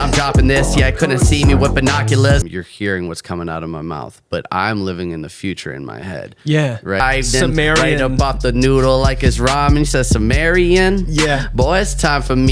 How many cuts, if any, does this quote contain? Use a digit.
2